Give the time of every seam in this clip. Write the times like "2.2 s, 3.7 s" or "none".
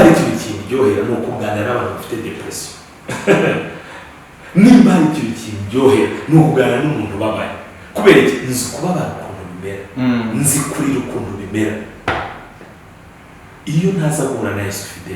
none

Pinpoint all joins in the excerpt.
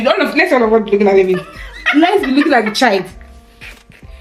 none

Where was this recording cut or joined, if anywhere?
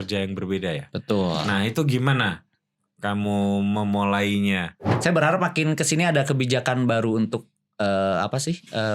4.9 s

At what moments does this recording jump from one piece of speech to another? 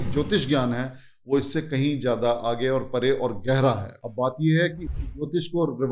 none

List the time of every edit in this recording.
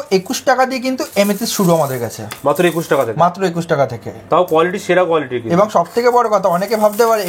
none

